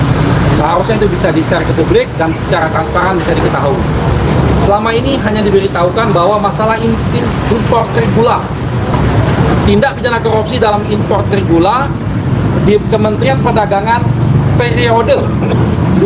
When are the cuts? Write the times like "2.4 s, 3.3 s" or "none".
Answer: 8.9 s